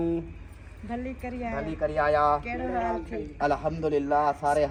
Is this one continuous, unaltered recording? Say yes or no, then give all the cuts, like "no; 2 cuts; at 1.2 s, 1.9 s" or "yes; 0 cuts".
yes; 0 cuts